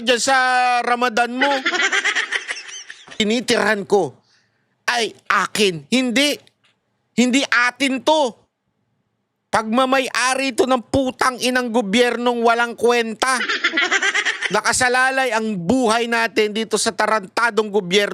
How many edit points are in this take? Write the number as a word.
one